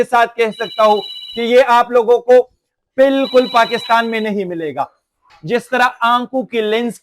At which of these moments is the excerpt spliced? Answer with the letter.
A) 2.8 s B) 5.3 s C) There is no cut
B